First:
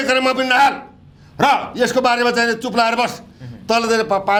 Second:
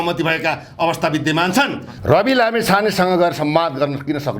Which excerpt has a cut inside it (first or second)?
second